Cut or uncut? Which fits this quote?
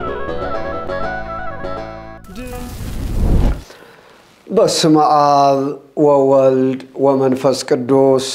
cut